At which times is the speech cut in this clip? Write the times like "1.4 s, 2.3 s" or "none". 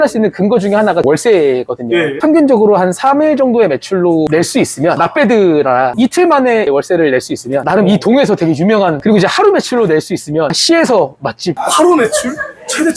2.2 s, 5.9 s, 9.0 s, 11.6 s